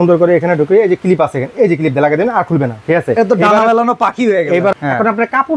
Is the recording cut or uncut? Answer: cut